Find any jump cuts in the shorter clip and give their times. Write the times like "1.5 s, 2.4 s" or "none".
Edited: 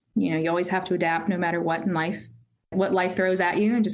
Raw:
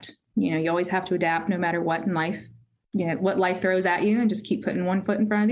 2.7 s